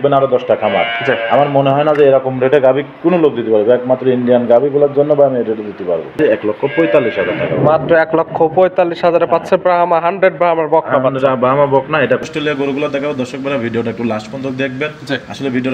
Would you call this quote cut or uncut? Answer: cut